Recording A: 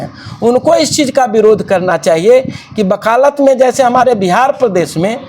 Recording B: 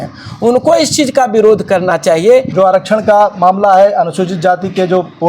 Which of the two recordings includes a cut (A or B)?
B